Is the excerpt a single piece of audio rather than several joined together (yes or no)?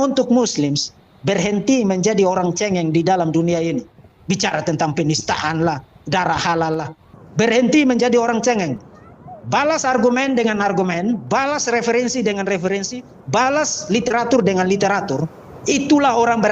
no